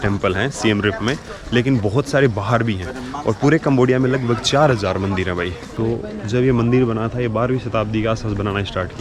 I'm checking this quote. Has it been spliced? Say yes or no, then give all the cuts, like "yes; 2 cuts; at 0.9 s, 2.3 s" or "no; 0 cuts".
no; 0 cuts